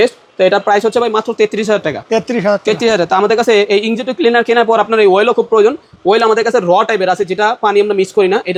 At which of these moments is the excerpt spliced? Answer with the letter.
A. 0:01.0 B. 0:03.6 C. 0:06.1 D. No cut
D